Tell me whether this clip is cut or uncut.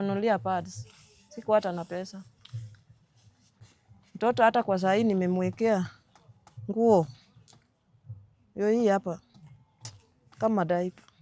cut